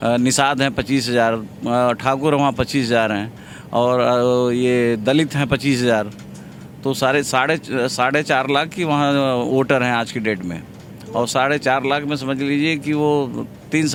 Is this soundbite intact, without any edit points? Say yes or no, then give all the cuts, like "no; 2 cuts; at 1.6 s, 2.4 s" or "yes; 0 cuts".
yes; 0 cuts